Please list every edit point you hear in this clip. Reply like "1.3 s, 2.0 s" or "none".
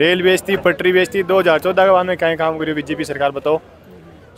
none